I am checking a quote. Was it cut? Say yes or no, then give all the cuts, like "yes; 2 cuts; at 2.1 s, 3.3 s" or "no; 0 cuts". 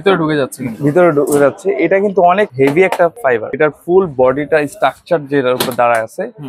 yes; 2 cuts; at 2.5 s, 3.3 s